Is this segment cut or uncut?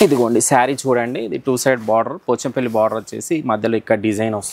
uncut